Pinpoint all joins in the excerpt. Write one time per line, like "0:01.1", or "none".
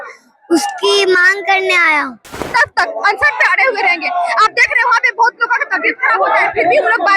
0:02.5